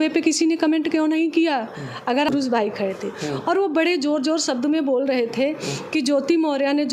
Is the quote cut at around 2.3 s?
yes; 1 cut; at 2.3 s

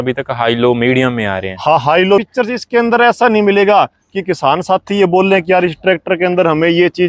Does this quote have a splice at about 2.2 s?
yes; 1 cut; at 2.2 s

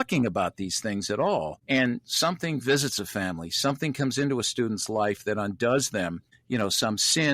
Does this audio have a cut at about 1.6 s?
yes; 2 cuts; at 1.6 s, 6.3 s

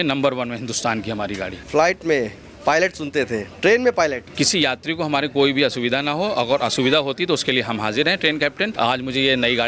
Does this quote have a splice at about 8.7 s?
yes; 3 cuts; at 1.5 s, 4.2 s, 8.7 s

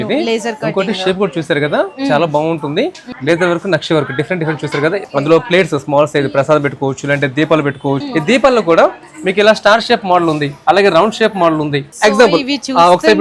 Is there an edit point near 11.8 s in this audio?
yes; 4 cuts; at 3.0 s, 5.1 s, 8.0 s, 11.8 s

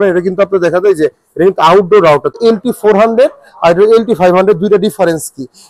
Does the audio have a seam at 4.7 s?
no; 1 cut; at 2.4 s

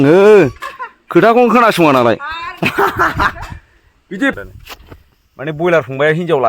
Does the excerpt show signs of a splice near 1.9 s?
no; 1 cut; at 4.4 s

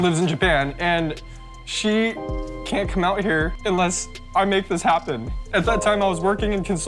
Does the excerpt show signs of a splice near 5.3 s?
yes; 2 cuts; at 3.5 s, 5.3 s

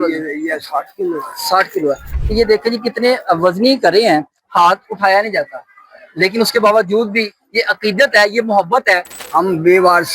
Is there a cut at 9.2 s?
yes; 2 cuts; at 2.1 s, 9.2 s

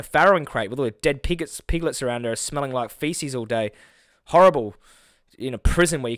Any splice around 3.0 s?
no; 0 cuts

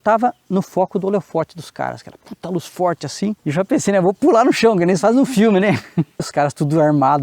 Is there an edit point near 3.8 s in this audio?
no; 1 cut; at 6.3 s

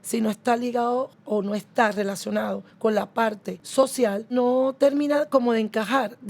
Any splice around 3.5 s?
yes; 4 cuts; at 1.2 s, 2.7 s, 3.5 s, 4.3 s

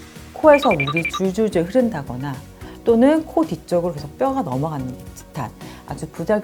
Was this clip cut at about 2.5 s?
no; 0 cuts

